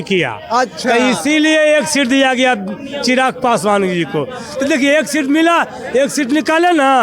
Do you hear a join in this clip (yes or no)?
no